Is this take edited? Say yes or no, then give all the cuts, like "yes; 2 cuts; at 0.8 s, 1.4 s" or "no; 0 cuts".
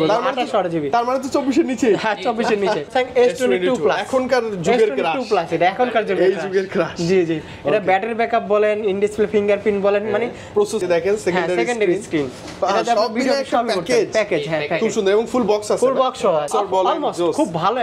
yes; 3 cuts; at 2.9 s, 10.8 s, 16.5 s